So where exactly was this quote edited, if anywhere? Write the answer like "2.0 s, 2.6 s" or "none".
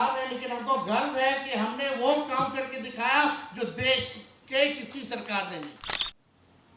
5.9 s